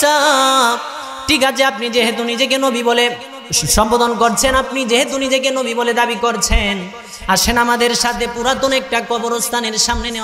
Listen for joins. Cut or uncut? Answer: uncut